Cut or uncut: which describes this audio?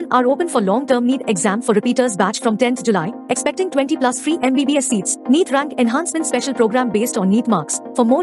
uncut